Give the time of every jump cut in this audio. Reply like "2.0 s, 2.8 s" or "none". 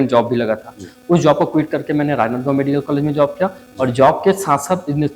none